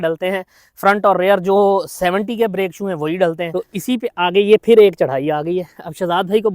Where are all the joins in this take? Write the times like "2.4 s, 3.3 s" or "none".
3.5 s